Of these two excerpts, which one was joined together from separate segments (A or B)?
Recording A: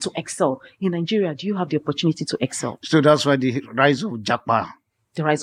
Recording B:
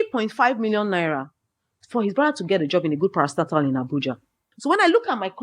B